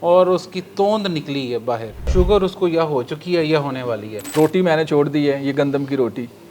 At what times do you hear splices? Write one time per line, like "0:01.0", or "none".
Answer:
0:01.9
0:04.1